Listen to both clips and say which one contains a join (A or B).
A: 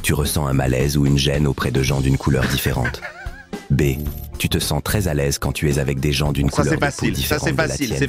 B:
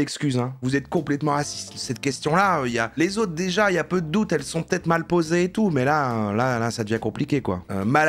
B